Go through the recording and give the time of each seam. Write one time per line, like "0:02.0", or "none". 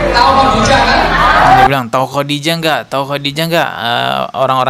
none